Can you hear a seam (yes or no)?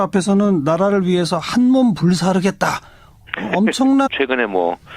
no